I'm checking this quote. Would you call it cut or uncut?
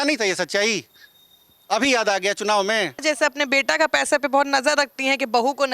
cut